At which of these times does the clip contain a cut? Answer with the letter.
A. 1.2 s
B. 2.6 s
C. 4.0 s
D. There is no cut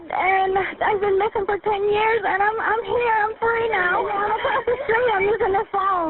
C